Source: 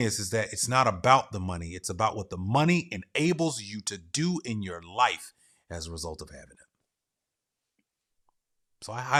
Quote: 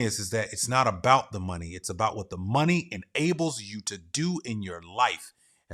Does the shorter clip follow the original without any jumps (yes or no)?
yes